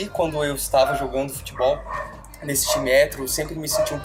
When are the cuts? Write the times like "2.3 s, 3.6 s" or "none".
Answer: none